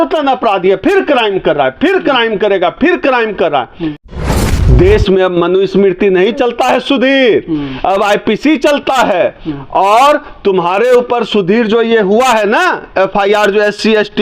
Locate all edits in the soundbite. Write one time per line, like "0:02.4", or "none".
0:04.1